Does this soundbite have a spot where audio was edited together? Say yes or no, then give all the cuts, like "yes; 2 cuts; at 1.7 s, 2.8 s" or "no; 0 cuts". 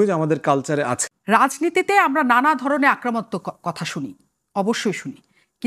yes; 1 cut; at 1.1 s